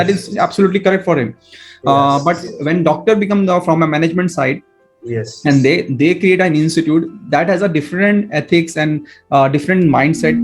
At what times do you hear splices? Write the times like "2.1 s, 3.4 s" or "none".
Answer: none